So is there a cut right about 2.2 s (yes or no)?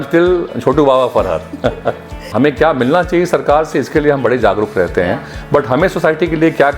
yes